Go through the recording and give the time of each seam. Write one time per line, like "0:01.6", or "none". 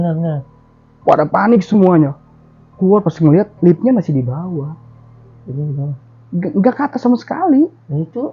none